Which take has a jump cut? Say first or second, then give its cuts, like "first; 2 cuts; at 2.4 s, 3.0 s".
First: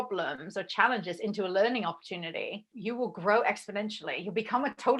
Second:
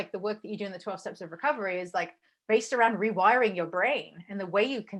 first; 1 cut; at 2.7 s